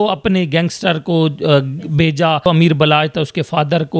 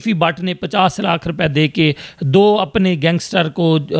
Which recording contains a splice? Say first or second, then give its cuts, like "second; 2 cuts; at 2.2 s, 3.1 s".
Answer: first; 1 cut; at 2.5 s